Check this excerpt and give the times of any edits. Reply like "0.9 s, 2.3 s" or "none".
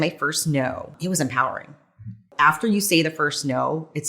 0.9 s, 2.3 s